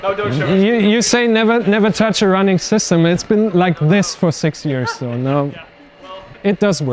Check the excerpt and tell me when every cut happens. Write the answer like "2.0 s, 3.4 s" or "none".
none